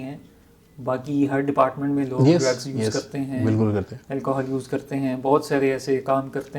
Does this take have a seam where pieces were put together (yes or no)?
no